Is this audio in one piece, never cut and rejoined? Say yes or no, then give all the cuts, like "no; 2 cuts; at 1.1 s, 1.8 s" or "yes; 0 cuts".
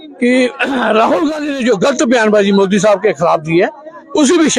yes; 0 cuts